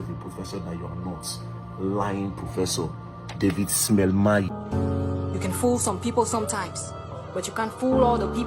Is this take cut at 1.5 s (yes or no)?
no